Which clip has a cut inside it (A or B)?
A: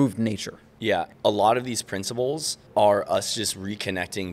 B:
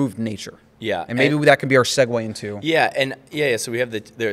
A